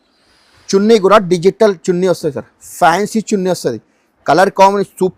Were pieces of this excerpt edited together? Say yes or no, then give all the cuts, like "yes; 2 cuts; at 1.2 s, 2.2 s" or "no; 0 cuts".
no; 0 cuts